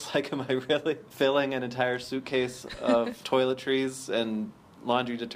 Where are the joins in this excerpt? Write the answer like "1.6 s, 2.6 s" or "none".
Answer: 1.1 s, 3.2 s